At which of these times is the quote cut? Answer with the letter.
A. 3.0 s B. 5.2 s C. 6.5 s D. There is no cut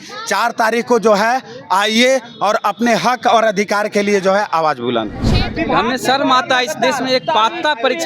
B